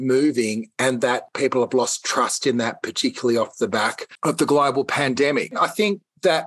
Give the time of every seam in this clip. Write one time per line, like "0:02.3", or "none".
0:01.3
0:04.1
0:05.6